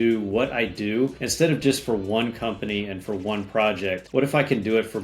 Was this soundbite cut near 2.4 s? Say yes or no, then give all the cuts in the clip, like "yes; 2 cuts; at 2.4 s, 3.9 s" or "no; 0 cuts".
no; 2 cuts; at 1.2 s, 4.0 s